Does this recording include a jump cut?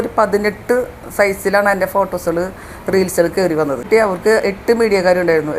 yes; 1 cut; at 3.9 s

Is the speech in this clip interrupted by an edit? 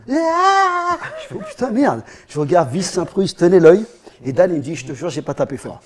no; 0 cuts

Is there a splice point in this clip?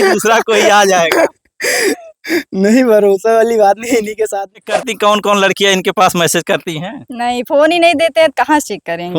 yes; 1 cut; at 4.6 s

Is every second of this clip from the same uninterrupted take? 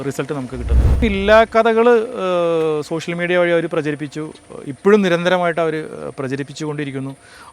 no; 1 cut; at 1.0 s

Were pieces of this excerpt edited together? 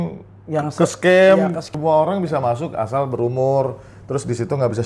yes; 1 cut; at 1.6 s

